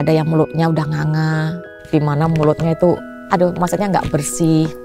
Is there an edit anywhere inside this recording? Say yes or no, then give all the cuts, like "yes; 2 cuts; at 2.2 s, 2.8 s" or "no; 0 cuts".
yes; 2 cuts; at 1.7 s, 3.1 s